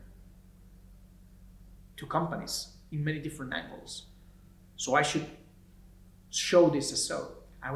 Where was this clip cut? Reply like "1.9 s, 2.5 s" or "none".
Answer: none